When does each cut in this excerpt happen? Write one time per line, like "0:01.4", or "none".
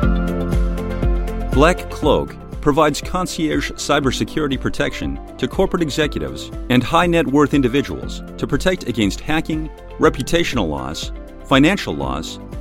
0:01.5